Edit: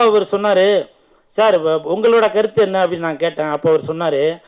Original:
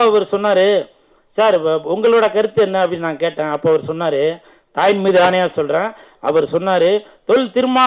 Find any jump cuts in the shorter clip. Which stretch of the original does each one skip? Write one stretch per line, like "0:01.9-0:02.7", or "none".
none